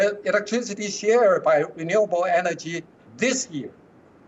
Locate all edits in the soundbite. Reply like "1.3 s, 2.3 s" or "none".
3.0 s